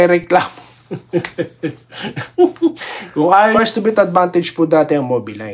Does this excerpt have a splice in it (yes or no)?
yes